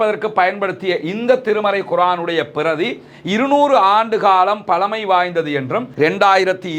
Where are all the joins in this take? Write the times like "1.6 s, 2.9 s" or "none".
5.9 s